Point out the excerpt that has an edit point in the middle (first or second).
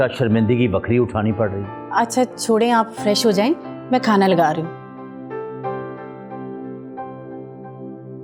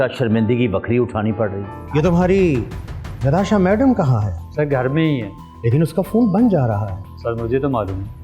second